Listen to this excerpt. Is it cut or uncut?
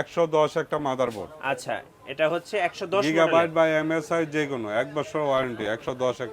uncut